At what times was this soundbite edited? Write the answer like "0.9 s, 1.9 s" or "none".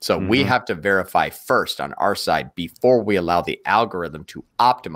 none